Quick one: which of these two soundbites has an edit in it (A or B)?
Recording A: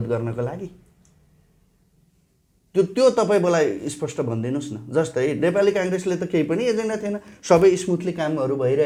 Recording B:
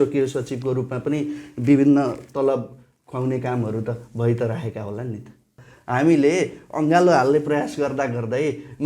B